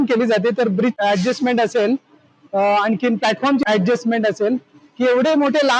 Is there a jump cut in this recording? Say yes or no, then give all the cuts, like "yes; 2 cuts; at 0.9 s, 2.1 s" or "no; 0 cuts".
yes; 1 cut; at 1.0 s